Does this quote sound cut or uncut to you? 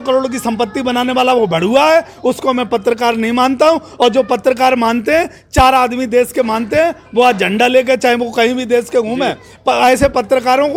uncut